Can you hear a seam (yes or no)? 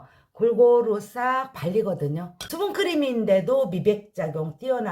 yes